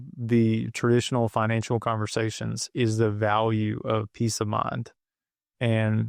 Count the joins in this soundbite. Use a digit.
0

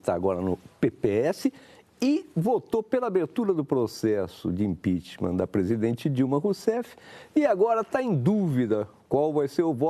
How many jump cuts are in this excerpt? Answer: 1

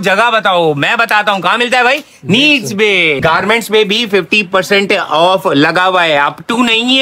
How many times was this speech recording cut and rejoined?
1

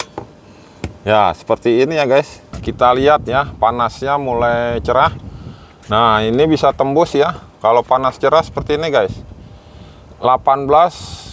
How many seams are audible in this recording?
1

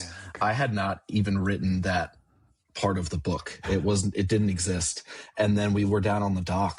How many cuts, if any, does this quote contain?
0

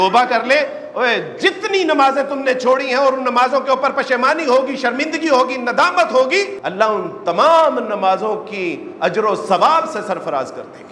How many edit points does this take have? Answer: 1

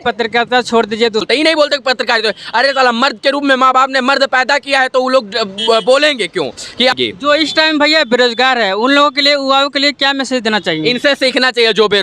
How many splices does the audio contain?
2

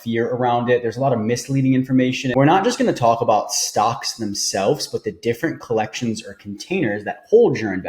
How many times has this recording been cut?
1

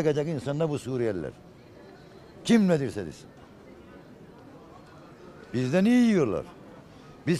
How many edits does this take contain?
0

